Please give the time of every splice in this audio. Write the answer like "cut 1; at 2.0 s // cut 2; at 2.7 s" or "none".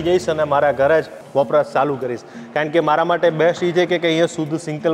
cut 1; at 1.2 s